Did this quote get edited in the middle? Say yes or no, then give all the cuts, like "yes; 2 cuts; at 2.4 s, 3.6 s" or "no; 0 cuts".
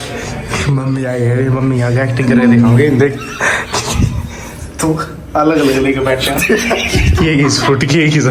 no; 0 cuts